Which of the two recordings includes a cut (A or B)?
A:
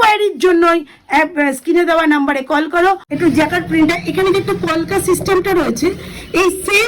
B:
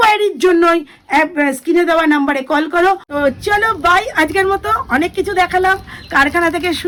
A